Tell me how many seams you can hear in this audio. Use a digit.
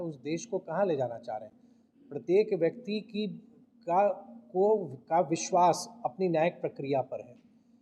0